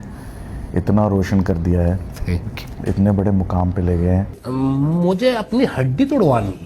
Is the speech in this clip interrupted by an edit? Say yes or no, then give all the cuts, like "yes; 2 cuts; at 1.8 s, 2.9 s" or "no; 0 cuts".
yes; 1 cut; at 4.4 s